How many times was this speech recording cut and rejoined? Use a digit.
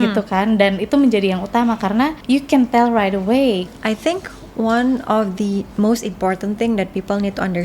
2